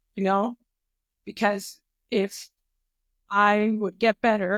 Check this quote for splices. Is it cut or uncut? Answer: uncut